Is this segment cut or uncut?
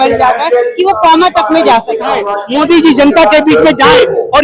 cut